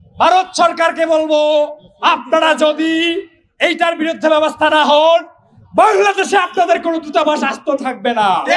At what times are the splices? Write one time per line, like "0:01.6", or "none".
0:05.9